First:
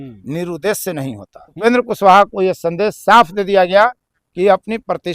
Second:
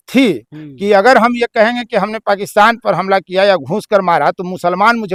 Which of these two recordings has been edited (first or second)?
first